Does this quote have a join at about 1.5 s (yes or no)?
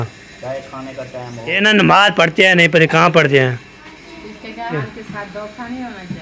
yes